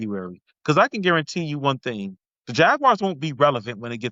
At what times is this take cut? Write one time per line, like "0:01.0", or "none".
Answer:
none